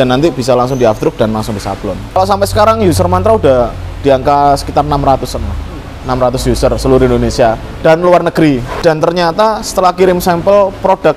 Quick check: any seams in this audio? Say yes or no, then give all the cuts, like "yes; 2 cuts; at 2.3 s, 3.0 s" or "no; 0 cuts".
yes; 2 cuts; at 2.2 s, 8.7 s